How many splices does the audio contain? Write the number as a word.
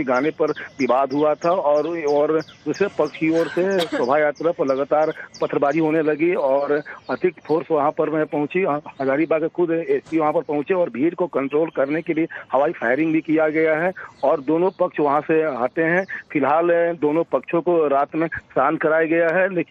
zero